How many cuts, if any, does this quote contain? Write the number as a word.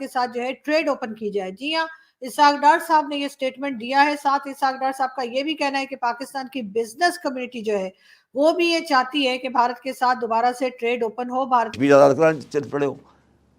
one